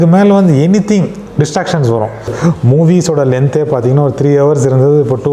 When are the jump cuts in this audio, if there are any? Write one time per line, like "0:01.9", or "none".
0:02.3